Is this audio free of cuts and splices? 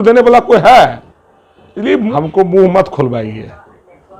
no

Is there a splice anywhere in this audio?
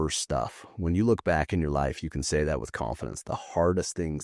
no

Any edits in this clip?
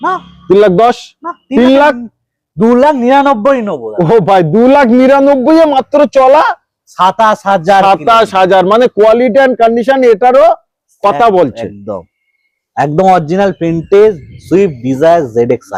no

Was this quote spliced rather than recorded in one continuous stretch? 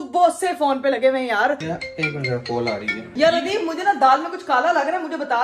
yes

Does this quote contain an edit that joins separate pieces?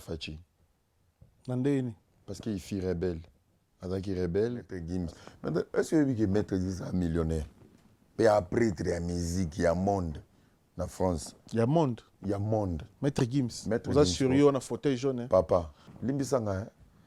yes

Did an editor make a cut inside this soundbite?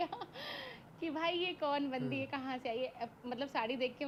no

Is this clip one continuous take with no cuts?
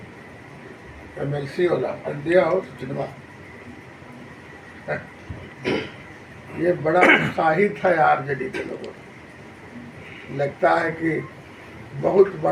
yes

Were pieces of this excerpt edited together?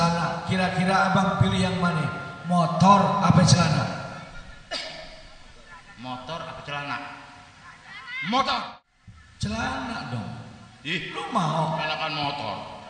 yes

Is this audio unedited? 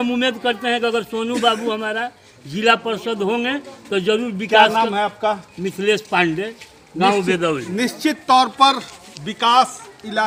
yes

